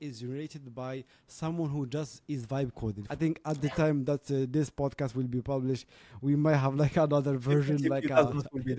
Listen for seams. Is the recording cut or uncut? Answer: cut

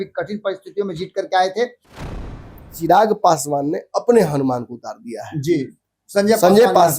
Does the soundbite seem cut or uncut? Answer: cut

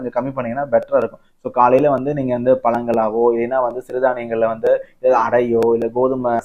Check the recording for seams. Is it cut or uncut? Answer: uncut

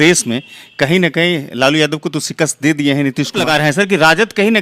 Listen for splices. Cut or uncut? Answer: cut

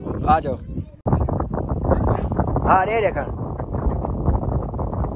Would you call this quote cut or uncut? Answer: cut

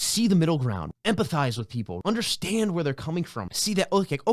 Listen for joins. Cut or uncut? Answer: cut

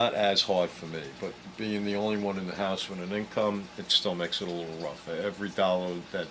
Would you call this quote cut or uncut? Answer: cut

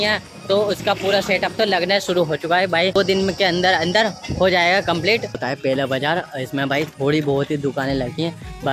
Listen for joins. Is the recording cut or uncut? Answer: cut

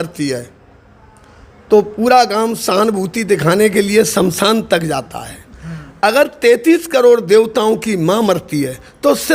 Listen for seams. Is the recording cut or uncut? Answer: uncut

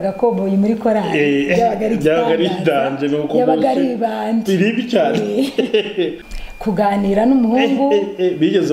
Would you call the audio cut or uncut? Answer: cut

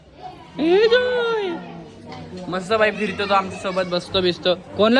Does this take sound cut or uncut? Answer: uncut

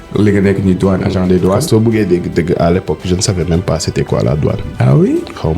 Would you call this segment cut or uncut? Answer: cut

